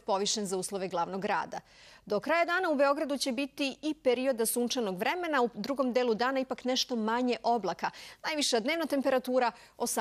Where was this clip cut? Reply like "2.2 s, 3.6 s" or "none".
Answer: 3.2 s